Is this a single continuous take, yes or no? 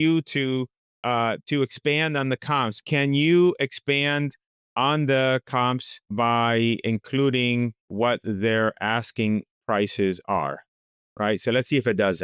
no